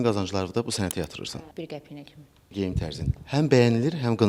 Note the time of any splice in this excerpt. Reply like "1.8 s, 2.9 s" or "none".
1.5 s, 2.5 s